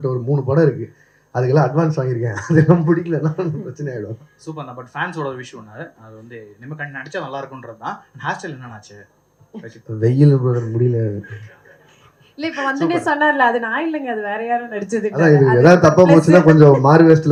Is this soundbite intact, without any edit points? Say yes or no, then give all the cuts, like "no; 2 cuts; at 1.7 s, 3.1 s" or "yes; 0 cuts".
yes; 0 cuts